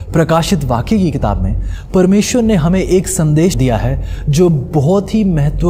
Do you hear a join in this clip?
yes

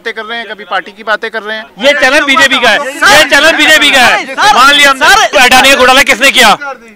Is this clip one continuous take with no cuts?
no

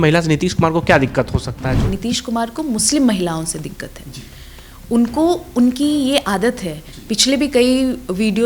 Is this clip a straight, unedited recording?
no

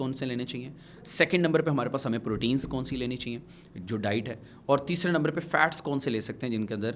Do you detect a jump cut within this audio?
no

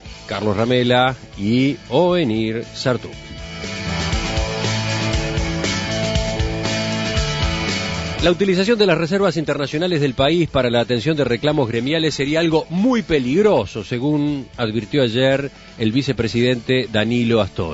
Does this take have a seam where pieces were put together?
yes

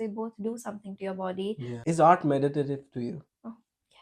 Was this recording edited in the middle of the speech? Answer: yes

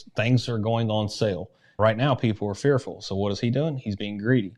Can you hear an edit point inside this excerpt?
yes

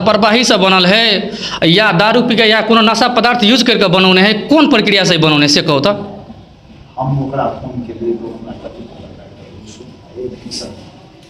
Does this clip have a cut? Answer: no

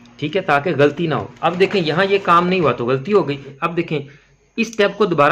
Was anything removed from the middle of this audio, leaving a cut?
yes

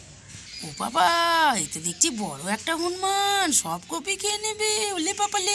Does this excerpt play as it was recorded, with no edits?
yes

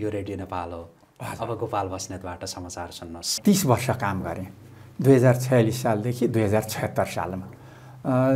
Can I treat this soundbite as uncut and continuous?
no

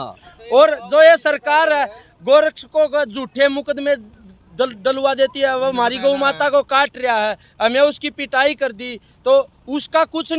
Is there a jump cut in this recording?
no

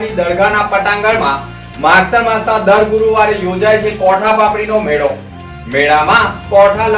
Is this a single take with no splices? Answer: yes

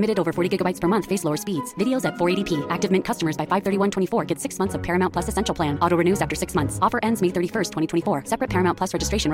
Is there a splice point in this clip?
no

